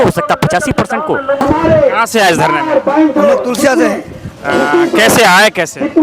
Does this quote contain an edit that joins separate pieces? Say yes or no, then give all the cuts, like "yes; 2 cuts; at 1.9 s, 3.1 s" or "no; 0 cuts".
yes; 1 cut; at 1.4 s